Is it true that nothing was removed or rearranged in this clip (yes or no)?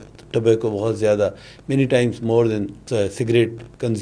no